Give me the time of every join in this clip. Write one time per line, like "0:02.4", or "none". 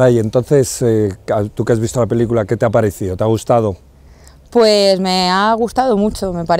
none

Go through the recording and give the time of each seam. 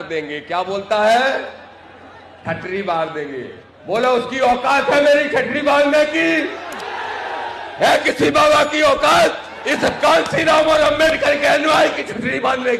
none

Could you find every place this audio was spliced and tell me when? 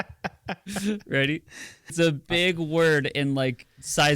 0:01.9

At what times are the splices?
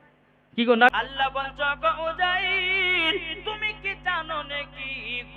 0:00.9

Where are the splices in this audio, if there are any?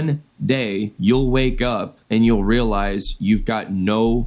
0:00.9
0:01.9

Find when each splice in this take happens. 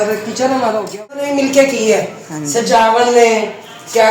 0:01.3

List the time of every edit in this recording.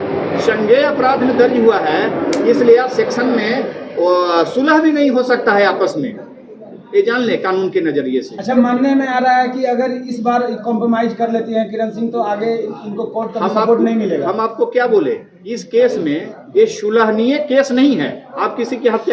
none

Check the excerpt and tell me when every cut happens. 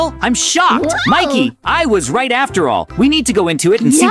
none

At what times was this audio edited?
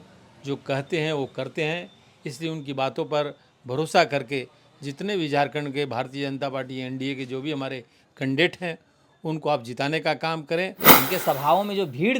0:10.9

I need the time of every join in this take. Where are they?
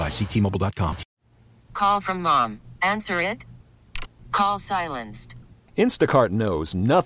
0:01.1

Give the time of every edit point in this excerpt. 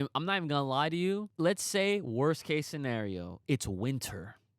0:01.3

